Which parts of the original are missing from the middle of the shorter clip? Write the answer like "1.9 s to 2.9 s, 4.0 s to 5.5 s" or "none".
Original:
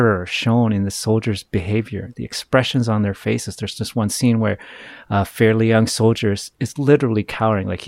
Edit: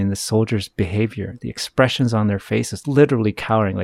3.5 s to 6.7 s